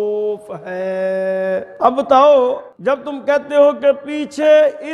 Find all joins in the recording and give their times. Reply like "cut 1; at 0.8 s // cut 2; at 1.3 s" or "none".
cut 1; at 1.7 s // cut 2; at 2.7 s